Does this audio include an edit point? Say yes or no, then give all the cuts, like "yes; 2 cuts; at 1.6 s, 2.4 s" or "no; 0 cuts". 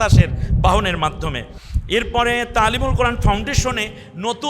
no; 0 cuts